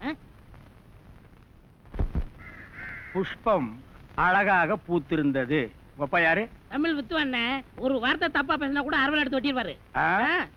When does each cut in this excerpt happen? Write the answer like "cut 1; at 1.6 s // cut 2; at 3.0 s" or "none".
none

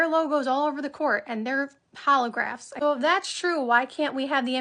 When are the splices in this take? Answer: cut 1; at 2.6 s

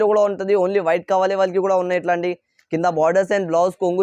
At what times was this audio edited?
none

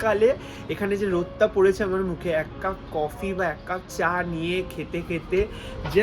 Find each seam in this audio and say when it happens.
none

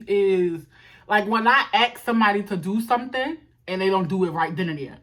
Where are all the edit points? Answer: none

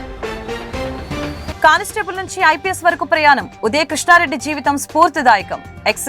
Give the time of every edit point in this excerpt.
cut 1; at 1.5 s

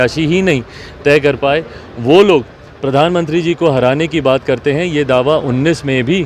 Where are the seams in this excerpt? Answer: none

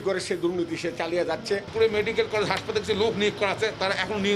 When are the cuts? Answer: cut 1; at 1.7 s

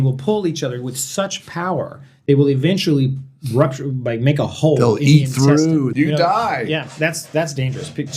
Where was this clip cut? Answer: cut 1; at 5.9 s

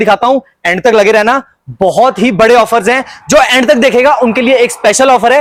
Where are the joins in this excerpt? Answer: none

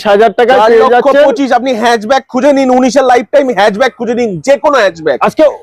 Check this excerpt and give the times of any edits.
none

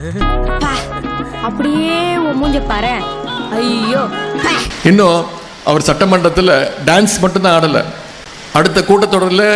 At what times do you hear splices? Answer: cut 1; at 4.7 s

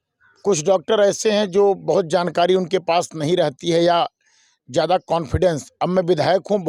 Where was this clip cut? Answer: none

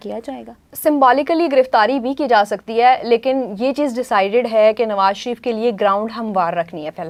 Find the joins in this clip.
none

